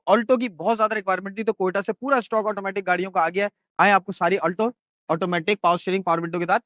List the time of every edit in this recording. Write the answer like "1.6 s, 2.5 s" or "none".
none